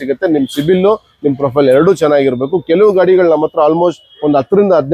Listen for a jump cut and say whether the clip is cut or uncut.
uncut